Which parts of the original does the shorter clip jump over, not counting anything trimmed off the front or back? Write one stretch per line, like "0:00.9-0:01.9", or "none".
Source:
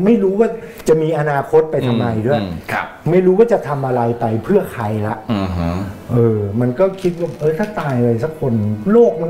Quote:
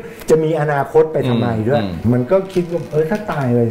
0:02.6-0:06.5